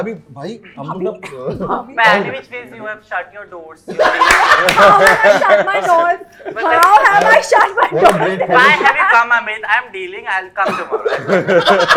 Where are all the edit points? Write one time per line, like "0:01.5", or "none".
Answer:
none